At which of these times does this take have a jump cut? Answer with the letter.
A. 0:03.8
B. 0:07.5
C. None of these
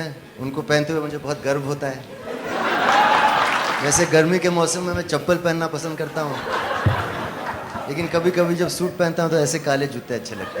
A